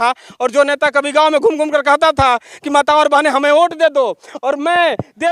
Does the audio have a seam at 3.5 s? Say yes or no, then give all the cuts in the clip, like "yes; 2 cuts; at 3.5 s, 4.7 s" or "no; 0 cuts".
no; 0 cuts